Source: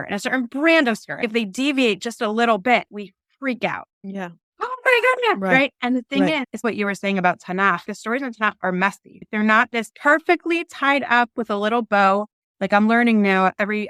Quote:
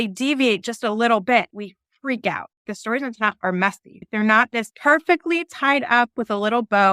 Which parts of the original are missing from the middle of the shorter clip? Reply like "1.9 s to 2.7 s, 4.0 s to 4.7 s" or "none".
4.0 s to 7.9 s